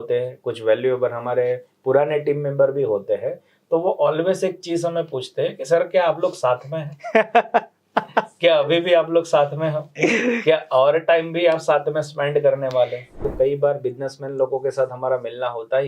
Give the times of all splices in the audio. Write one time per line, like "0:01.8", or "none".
0:13.3

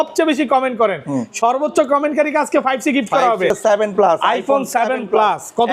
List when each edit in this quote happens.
0:03.5

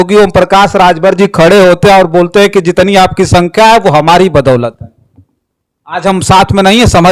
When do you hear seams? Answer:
none

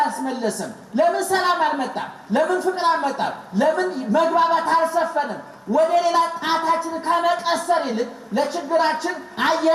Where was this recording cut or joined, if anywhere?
none

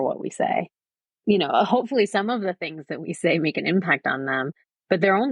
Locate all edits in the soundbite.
0:00.9

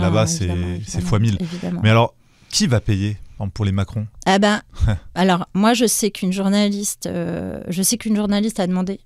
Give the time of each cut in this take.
none

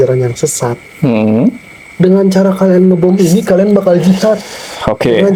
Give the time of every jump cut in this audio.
none

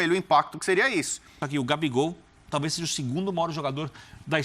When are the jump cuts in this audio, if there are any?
0:01.4

